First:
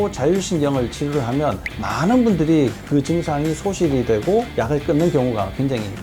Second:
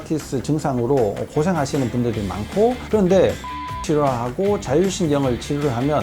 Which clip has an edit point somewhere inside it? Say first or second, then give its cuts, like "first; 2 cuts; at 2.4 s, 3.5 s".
second; 1 cut; at 2.8 s